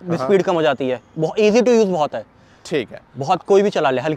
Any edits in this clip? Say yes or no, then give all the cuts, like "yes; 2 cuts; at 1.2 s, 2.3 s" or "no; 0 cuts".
no; 0 cuts